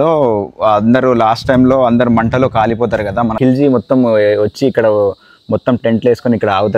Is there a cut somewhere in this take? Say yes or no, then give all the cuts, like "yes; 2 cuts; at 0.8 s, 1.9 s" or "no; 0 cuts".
yes; 1 cut; at 3.4 s